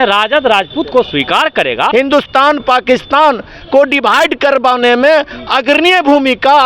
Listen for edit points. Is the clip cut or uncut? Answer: cut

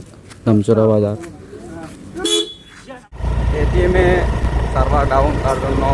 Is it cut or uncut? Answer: cut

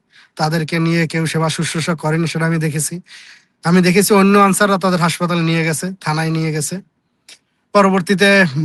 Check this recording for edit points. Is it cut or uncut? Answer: uncut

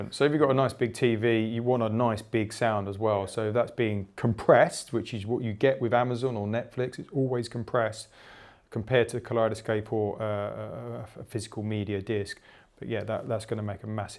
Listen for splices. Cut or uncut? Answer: uncut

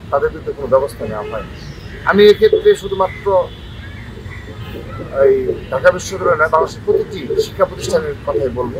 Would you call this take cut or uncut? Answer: uncut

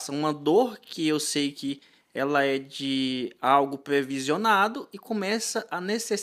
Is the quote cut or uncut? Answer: uncut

